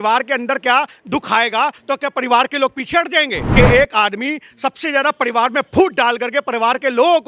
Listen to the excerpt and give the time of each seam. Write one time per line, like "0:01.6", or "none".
0:03.4